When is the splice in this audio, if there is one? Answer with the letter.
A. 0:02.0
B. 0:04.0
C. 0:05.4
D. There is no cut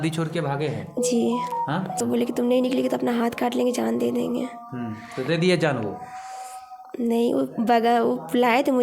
A